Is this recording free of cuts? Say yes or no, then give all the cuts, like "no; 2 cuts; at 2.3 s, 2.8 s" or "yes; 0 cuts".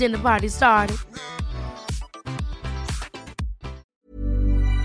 no; 1 cut; at 3.8 s